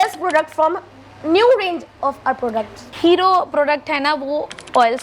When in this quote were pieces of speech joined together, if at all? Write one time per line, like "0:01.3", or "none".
none